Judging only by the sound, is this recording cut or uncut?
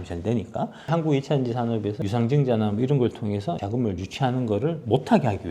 cut